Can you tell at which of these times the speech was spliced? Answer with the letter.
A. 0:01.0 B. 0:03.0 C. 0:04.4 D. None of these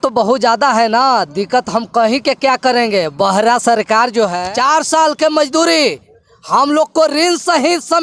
C